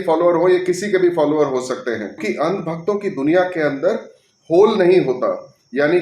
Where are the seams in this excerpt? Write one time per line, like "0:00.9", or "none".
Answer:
0:02.2